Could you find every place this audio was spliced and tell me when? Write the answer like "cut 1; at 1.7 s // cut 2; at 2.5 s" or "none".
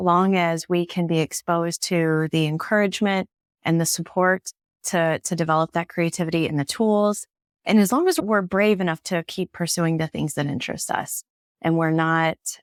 none